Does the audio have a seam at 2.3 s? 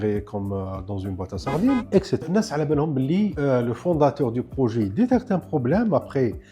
yes; 1 cut; at 2.3 s

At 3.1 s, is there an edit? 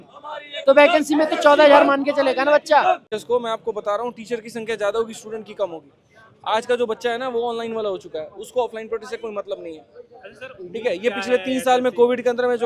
yes; 1 cut; at 3.1 s

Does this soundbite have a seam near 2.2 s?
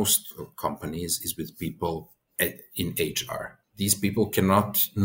yes; 2 cuts; at 2.2 s, 3.6 s

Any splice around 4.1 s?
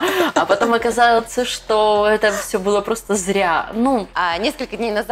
yes; 1 cut; at 4.1 s

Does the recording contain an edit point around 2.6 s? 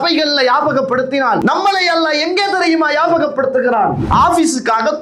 no; 2 cuts; at 1.4 s, 4.0 s

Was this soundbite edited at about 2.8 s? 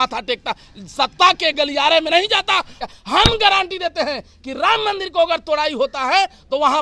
yes; 1 cut; at 2.8 s

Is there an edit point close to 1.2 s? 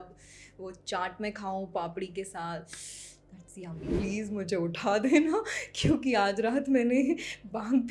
no; 1 cut; at 3.9 s

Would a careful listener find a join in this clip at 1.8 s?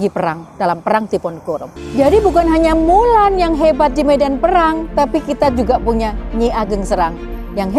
yes; 1 cut; at 1.8 s

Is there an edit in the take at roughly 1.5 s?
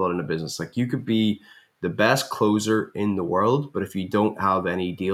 no; 0 cuts

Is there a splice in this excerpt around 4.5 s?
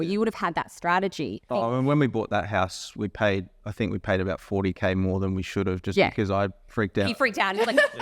no; 1 cut; at 1.5 s

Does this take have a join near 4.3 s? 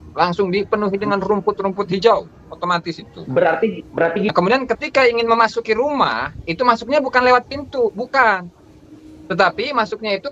yes; 1 cut; at 4.3 s

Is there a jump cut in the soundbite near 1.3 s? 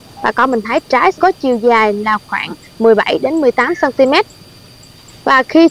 no; 0 cuts

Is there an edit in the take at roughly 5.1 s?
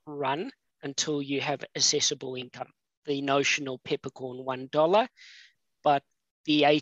no; 0 cuts

